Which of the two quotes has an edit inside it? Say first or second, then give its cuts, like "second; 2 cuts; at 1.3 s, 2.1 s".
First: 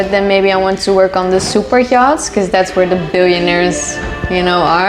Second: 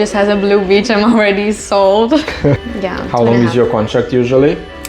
second; 1 cut; at 2.6 s